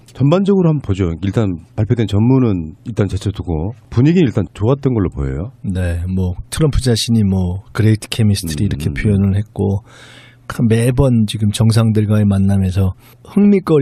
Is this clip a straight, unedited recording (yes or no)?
yes